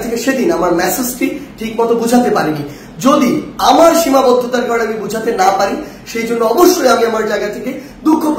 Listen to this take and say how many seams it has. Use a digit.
0